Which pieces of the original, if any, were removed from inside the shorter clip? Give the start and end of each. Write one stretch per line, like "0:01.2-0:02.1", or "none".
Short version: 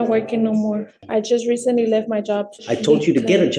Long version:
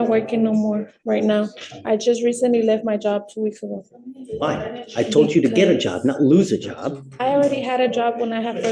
0:00.9-0:01.7
0:03.3-0:04.8

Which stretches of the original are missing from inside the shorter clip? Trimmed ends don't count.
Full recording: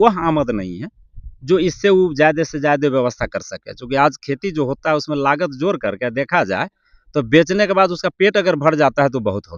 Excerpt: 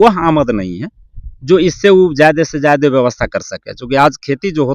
none

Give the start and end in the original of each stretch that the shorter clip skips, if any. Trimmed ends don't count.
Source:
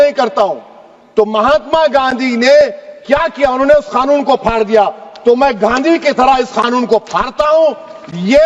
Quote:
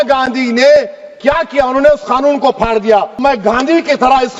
0:05.1-0:05.4

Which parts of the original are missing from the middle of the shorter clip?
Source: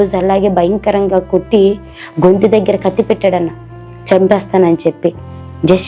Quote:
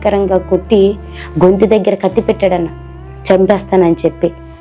none

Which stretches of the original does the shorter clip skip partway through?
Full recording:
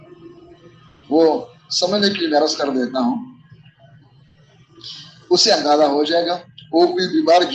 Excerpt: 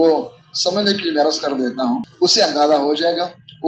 0:03.2-0:05.2

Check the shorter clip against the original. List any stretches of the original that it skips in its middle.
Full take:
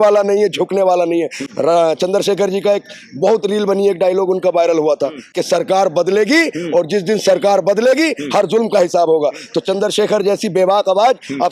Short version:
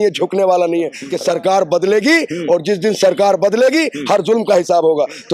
0:01.4-0:05.3

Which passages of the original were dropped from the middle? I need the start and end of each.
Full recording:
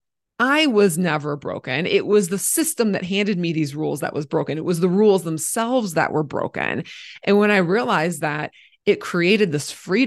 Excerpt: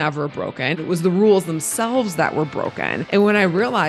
0:01.8-0:04.5
0:06.8-0:07.1

